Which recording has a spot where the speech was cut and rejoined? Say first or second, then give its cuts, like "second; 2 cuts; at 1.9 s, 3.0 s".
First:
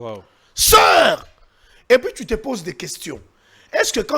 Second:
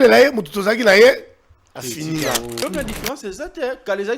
second; 1 cut; at 2.6 s